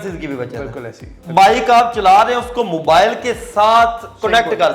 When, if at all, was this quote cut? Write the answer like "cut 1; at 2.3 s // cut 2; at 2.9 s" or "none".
cut 1; at 1.2 s